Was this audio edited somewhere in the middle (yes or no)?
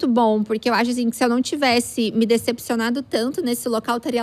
no